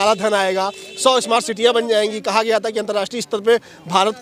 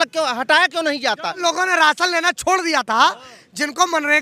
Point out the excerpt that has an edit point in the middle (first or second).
second